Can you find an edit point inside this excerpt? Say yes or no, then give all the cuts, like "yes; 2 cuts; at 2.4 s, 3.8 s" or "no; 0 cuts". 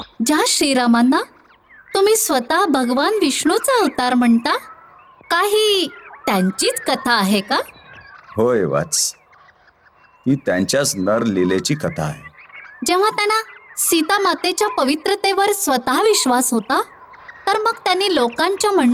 no; 0 cuts